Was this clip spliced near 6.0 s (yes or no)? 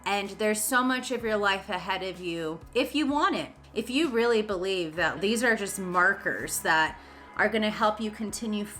no